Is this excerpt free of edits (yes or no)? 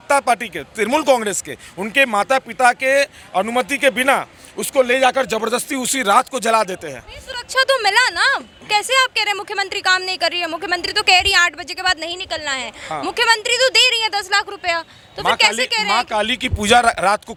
yes